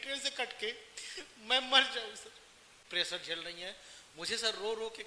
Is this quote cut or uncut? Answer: cut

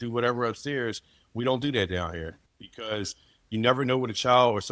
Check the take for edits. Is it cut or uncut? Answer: cut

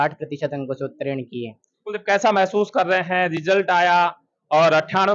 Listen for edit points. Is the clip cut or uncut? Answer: uncut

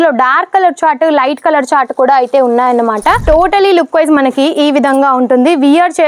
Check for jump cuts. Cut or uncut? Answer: cut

